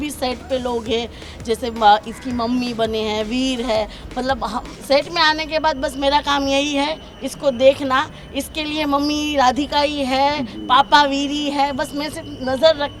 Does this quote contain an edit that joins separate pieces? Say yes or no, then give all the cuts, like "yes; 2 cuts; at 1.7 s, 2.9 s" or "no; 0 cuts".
no; 0 cuts